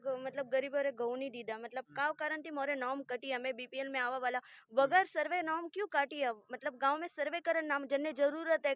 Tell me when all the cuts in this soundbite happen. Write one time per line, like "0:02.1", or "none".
none